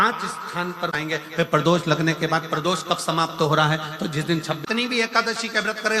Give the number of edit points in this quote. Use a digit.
2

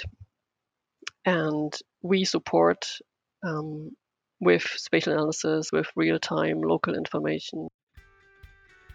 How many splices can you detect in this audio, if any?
1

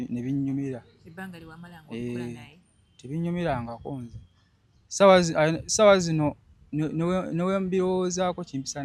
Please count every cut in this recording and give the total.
0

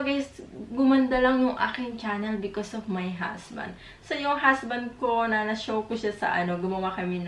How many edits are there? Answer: 0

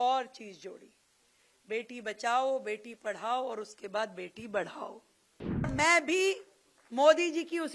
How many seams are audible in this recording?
1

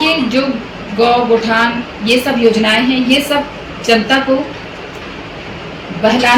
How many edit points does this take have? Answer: 0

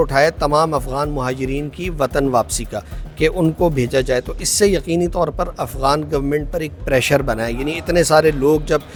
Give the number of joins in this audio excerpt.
0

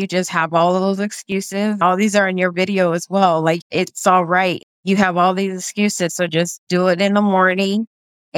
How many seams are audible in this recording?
3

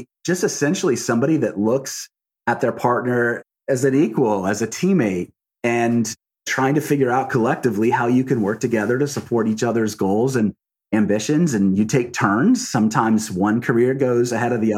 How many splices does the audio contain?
1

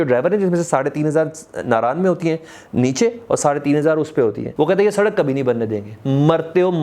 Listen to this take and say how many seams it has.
1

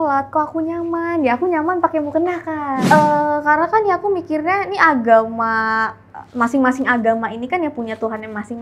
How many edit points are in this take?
1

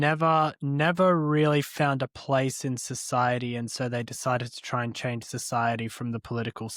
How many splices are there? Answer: 0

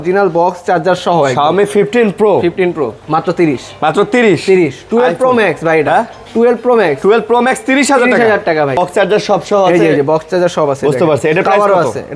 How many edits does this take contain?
2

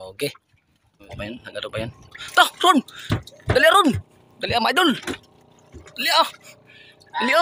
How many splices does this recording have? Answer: 1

